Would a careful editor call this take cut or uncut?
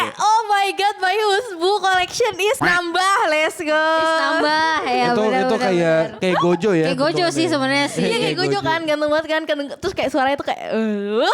cut